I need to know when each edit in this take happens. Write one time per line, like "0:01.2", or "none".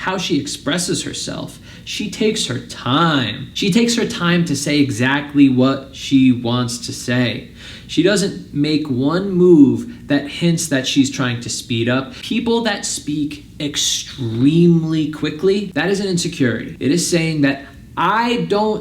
0:12.2
0:16.7